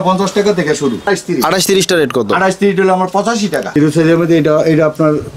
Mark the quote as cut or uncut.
cut